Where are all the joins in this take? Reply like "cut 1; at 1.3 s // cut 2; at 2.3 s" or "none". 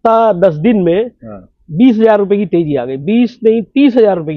none